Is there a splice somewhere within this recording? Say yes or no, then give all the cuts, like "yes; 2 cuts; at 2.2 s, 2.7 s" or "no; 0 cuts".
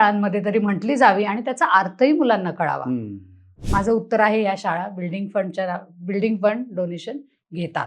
yes; 1 cut; at 3.5 s